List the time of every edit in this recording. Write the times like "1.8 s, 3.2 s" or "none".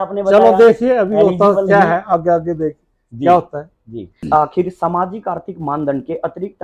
4.2 s